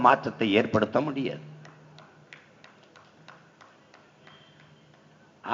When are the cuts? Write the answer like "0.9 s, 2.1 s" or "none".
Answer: none